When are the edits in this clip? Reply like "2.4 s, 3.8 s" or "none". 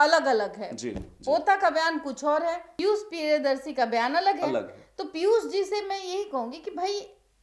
none